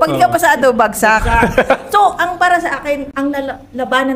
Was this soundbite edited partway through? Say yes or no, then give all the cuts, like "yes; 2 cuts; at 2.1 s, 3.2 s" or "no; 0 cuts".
no; 0 cuts